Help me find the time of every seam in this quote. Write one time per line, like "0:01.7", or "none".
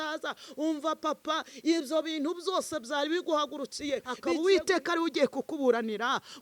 0:04.4